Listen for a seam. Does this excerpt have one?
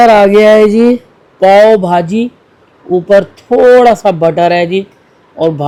no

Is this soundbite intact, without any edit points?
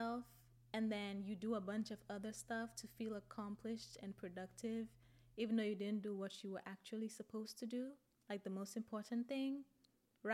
yes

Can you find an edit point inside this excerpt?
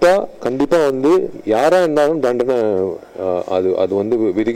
no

